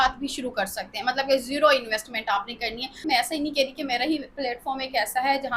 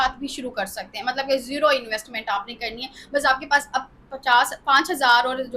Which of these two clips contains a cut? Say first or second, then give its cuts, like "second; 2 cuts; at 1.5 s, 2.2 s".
first; 1 cut; at 3.0 s